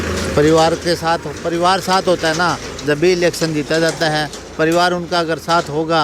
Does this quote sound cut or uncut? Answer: uncut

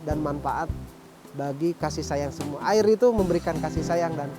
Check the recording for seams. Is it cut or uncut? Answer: uncut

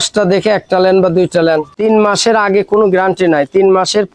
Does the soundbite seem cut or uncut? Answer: cut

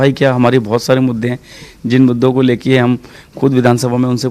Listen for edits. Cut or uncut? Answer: uncut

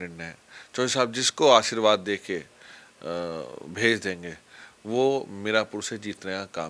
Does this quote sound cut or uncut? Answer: uncut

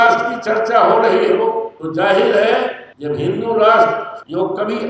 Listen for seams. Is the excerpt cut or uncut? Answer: uncut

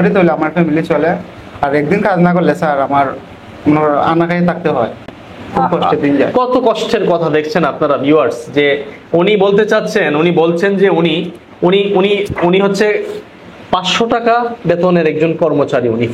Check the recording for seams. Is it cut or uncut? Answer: uncut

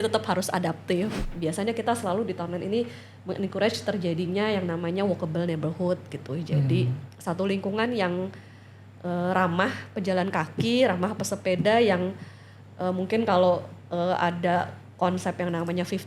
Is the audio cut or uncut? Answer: cut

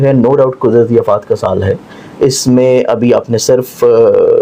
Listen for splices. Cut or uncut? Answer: uncut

